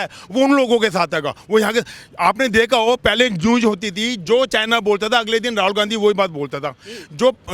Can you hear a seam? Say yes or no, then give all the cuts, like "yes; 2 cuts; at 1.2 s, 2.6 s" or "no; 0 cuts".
no; 0 cuts